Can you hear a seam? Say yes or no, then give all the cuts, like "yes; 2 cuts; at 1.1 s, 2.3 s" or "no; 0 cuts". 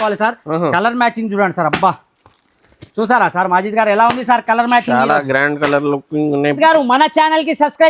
yes; 1 cut; at 6.6 s